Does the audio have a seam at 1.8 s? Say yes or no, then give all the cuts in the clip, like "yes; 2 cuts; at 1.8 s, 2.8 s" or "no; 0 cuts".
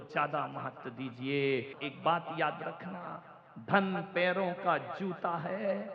yes; 1 cut; at 1.8 s